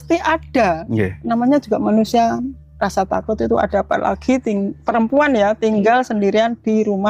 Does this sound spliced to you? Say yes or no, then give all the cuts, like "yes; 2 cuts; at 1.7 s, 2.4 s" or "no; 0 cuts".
no; 0 cuts